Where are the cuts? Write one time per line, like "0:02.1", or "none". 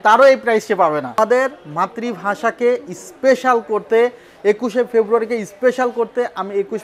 0:01.2